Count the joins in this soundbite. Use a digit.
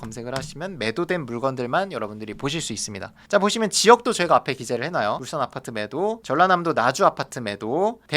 1